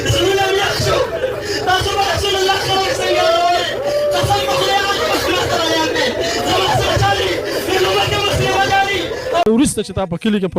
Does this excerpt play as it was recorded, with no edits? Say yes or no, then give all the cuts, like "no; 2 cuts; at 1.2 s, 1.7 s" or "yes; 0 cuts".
no; 1 cut; at 9.4 s